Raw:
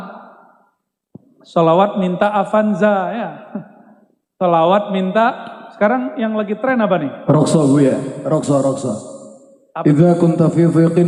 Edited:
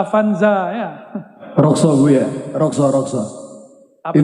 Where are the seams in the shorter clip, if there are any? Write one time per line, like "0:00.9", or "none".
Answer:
0:01.4